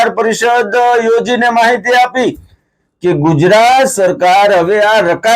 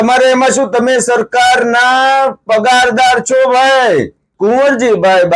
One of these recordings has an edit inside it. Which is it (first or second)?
second